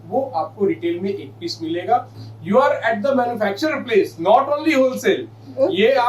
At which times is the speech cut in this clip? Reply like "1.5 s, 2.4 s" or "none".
2.1 s

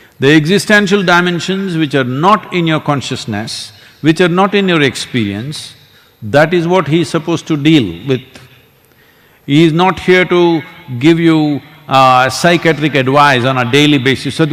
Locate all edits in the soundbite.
none

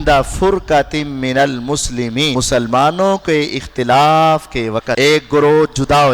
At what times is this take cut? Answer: 2.3 s, 4.9 s

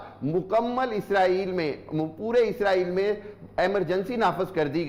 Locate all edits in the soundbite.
none

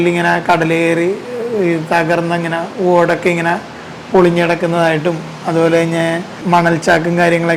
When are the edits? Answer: none

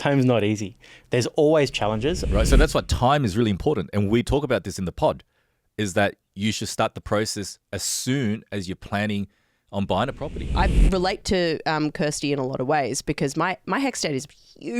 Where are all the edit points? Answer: 2.3 s, 10.5 s

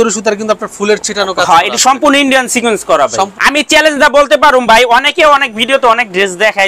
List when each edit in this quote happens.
3.3 s

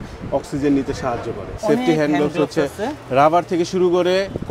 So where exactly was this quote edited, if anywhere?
1.5 s

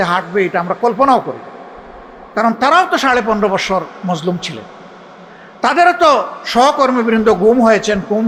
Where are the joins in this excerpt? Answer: none

